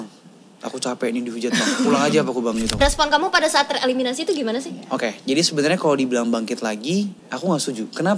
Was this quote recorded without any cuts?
no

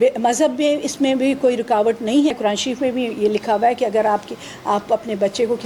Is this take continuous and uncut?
no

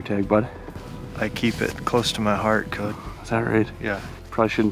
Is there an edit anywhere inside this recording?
no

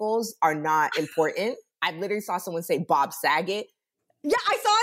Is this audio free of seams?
yes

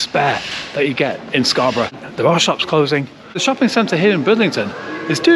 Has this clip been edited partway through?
yes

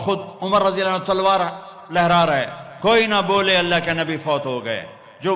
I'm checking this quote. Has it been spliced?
no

